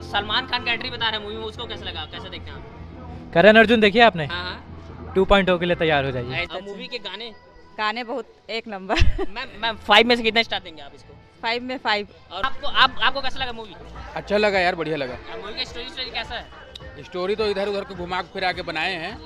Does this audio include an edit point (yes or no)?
yes